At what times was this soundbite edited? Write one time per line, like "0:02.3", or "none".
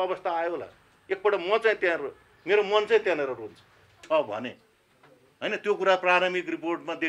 0:04.0